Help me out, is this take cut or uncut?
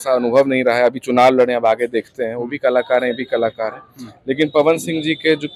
uncut